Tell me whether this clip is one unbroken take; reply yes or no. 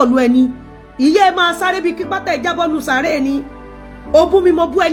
yes